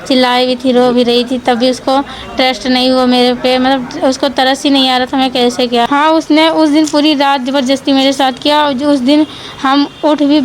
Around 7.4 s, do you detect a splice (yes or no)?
no